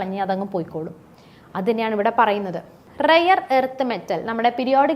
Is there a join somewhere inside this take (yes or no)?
yes